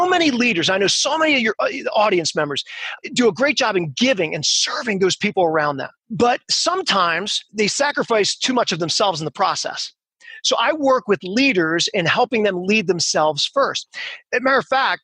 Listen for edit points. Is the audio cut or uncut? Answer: uncut